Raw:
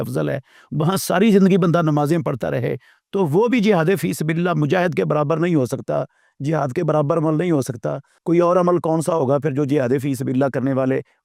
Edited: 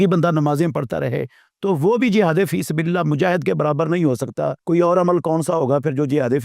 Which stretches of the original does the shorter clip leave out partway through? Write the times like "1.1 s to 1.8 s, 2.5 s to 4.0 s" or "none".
6.1 s to 8.2 s